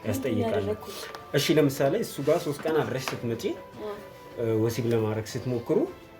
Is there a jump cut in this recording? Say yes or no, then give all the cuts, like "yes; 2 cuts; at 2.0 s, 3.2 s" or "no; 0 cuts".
no; 0 cuts